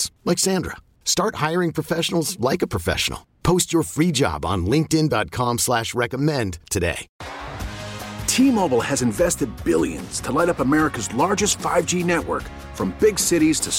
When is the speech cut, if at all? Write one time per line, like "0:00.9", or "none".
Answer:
0:07.1